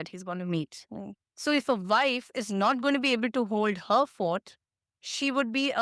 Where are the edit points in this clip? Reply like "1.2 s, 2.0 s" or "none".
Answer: none